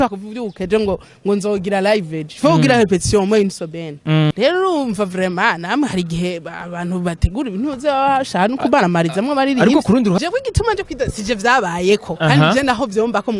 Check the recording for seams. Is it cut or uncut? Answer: cut